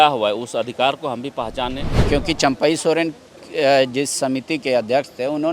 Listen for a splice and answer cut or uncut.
cut